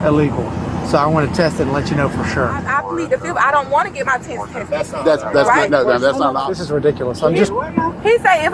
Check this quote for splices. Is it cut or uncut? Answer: cut